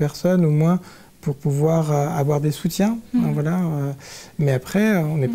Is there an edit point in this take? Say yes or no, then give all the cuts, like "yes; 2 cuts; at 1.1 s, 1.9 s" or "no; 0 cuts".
no; 0 cuts